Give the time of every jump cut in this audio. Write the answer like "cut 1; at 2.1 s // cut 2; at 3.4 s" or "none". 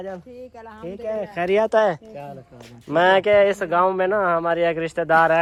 none